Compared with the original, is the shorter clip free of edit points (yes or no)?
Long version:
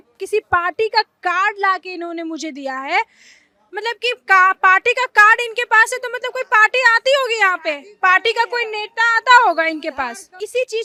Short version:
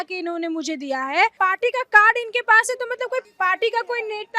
no